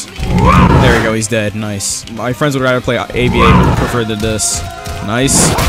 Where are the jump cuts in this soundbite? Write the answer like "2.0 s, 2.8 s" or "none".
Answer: 2.1 s